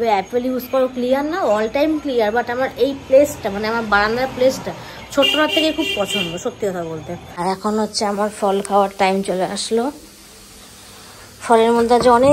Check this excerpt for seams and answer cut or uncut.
cut